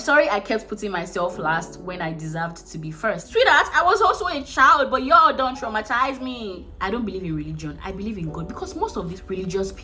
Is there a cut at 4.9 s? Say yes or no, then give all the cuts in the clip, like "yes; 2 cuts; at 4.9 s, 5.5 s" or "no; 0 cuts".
no; 2 cuts; at 3.2 s, 6.7 s